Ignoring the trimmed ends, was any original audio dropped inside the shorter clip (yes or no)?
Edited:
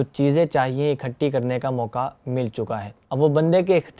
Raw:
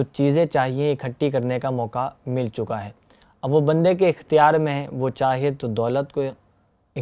yes